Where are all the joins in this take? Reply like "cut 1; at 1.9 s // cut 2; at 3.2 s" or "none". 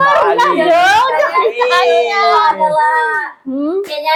none